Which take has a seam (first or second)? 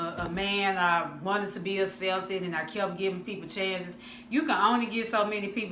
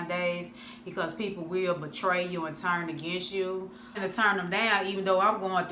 second